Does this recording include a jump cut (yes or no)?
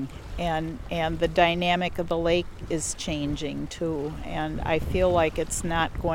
no